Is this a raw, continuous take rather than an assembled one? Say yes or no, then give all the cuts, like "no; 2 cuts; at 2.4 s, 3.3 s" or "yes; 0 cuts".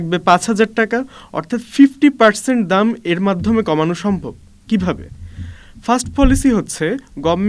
yes; 0 cuts